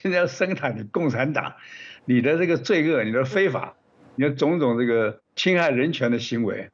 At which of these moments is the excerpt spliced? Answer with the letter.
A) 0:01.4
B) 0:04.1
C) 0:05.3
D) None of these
C